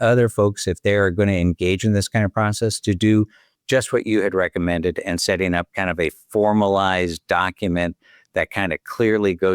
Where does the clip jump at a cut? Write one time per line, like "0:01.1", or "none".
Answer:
none